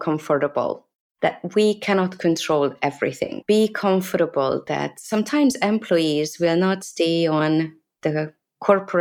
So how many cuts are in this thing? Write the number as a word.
zero